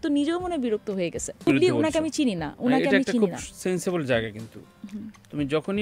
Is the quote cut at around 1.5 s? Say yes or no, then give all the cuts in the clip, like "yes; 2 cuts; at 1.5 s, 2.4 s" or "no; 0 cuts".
yes; 1 cut; at 1.5 s